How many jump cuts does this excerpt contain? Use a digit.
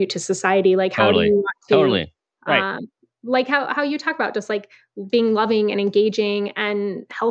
0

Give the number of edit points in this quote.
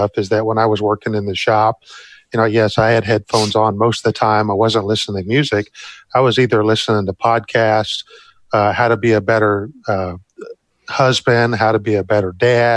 0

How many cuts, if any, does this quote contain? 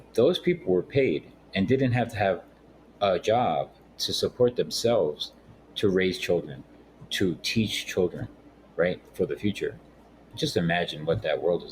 4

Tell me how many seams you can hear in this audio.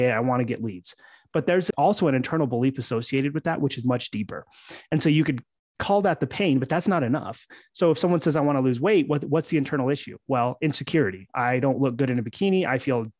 1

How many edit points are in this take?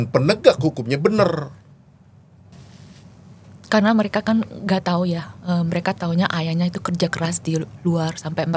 1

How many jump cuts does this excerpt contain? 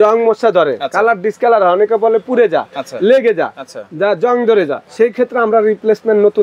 1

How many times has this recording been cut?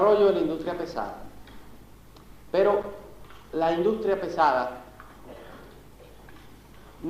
1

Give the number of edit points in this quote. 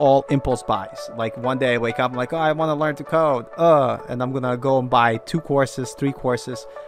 0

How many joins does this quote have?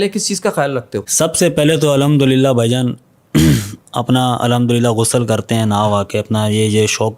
1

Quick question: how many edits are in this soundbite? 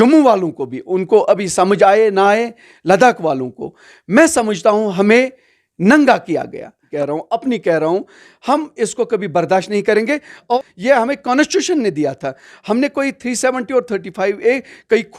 2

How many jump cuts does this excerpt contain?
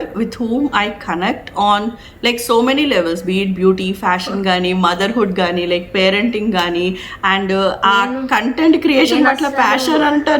0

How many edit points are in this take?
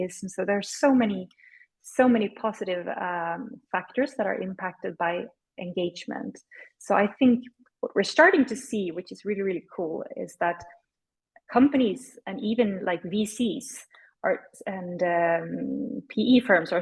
0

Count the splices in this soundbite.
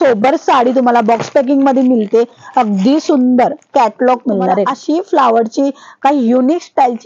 1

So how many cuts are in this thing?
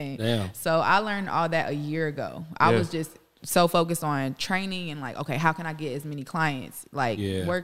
0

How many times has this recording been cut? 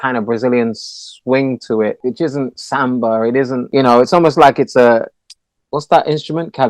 2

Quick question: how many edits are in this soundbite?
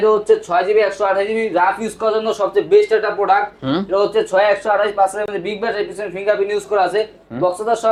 0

